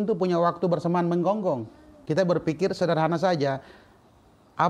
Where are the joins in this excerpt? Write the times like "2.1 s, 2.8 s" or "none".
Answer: 1.9 s

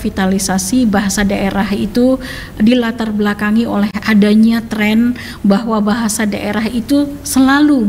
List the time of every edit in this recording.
none

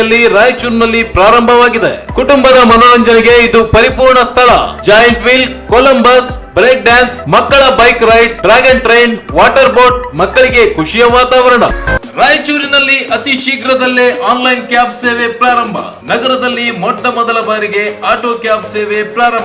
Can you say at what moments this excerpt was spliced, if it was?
11.8 s

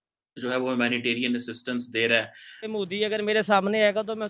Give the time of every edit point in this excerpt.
2.7 s

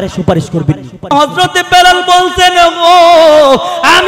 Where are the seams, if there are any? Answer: 1.1 s

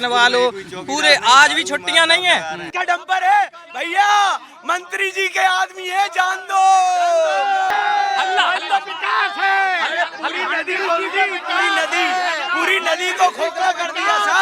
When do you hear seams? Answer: 2.6 s, 7.7 s

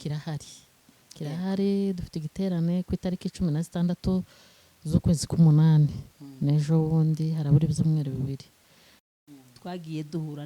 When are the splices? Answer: 9.1 s

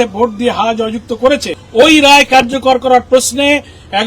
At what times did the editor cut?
1.6 s

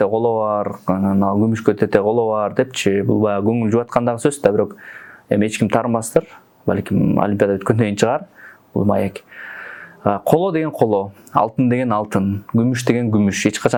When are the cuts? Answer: none

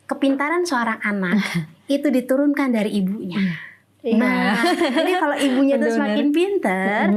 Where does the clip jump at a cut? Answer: none

